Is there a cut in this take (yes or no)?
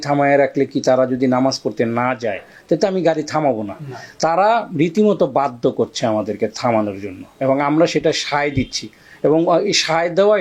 no